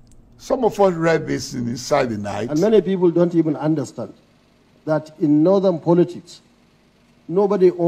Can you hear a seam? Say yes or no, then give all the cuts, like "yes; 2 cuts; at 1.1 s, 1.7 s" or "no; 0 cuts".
yes; 1 cut; at 2.4 s